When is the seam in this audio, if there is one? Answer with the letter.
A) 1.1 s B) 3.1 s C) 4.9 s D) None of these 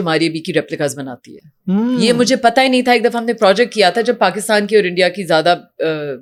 D